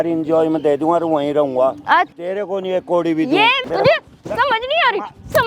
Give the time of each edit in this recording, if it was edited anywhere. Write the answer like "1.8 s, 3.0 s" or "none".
2.2 s, 3.6 s